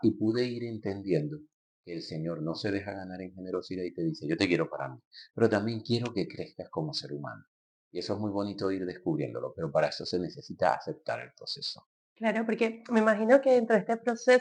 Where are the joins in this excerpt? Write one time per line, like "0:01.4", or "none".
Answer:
none